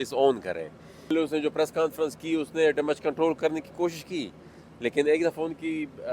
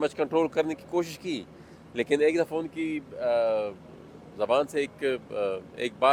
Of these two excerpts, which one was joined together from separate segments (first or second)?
first